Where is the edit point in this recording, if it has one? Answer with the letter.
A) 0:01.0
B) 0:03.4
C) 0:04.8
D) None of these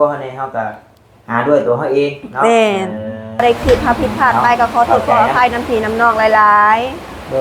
B